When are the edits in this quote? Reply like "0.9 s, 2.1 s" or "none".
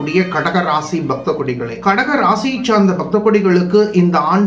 1.7 s